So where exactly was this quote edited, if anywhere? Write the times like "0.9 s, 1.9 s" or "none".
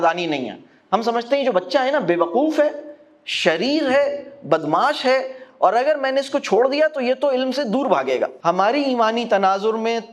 8.3 s